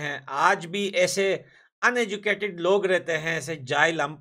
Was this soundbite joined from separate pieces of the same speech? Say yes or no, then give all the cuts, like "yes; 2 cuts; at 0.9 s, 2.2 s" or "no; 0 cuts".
no; 0 cuts